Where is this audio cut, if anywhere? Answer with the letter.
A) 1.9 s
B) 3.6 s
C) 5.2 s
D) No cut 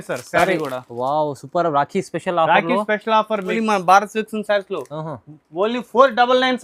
B